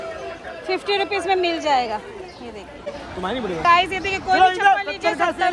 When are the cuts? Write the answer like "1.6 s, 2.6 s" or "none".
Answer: 3.0 s